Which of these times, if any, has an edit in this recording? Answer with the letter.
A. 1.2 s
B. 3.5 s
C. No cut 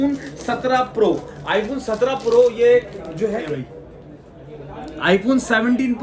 B